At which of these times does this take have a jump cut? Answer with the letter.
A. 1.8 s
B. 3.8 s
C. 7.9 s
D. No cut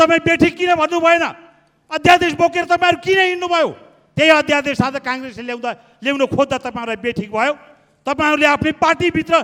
D